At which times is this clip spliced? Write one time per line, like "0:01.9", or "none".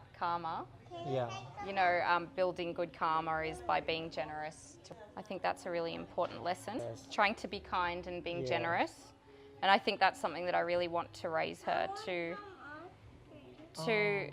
0:04.9
0:07.0